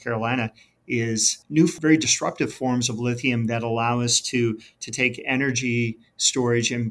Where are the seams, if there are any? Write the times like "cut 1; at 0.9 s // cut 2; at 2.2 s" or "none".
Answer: cut 1; at 1.7 s